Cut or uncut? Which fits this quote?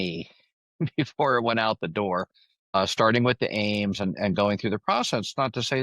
cut